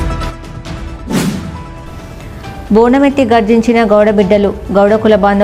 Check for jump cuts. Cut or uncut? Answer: uncut